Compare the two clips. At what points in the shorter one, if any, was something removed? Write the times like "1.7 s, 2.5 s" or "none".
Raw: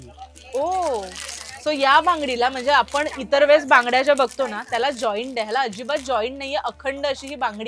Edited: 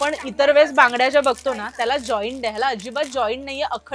none